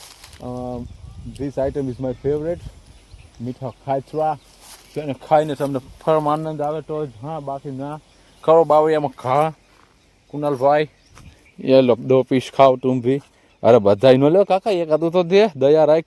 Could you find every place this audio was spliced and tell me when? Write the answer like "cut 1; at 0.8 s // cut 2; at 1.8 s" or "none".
none